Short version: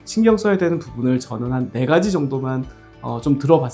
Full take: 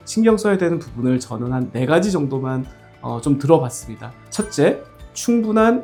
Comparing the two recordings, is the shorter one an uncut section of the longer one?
yes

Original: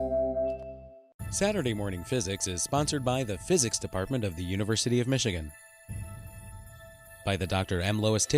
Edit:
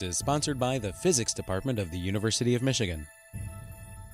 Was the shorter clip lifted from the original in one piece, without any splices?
no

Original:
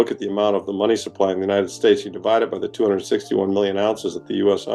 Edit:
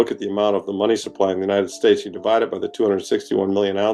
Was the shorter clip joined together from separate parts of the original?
no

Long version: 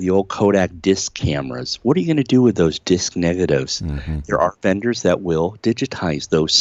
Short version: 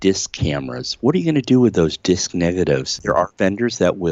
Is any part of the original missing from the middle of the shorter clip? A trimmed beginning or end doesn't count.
yes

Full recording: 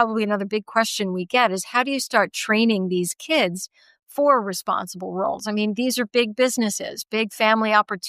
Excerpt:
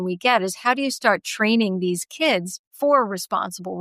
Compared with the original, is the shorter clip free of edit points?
no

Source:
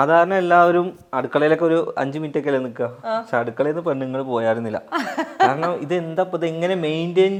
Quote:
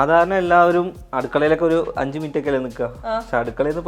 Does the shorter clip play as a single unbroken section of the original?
yes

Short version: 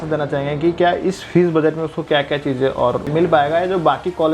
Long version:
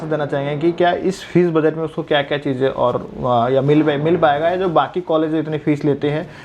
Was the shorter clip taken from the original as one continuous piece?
no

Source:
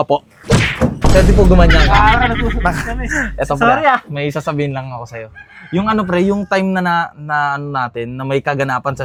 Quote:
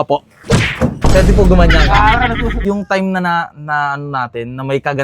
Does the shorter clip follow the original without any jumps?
no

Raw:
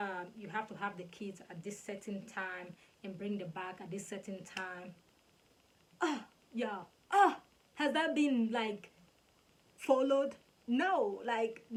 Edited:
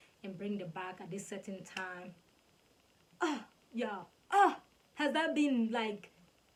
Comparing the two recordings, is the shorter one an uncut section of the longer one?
yes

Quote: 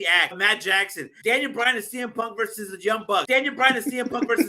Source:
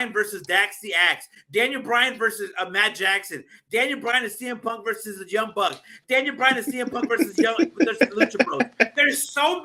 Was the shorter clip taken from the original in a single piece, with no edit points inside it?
no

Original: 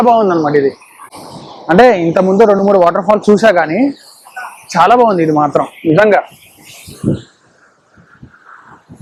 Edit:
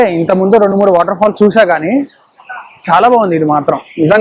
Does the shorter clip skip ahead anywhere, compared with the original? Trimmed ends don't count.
no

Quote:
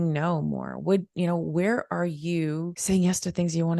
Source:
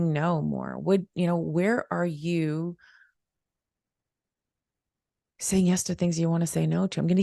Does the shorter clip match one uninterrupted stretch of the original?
no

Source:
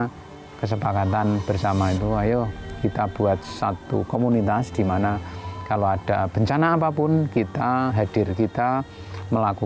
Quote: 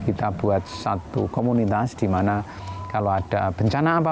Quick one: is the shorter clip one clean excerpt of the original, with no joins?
yes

